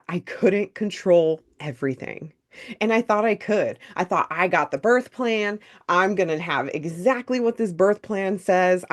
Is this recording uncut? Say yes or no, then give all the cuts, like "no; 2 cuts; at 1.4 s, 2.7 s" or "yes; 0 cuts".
yes; 0 cuts